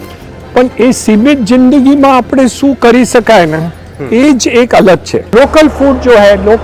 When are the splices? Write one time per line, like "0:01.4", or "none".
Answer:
0:05.2